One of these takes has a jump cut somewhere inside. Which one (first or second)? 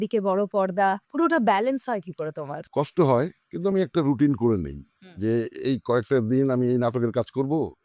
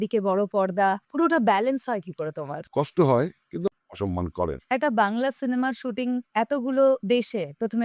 second